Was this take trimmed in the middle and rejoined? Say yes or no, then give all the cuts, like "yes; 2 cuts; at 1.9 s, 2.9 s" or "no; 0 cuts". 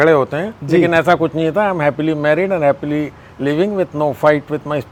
no; 0 cuts